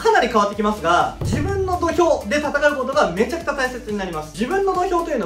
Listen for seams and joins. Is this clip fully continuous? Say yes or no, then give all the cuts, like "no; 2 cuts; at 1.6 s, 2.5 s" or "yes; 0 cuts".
no; 1 cut; at 4.2 s